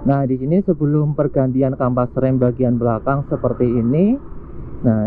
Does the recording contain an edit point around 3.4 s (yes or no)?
no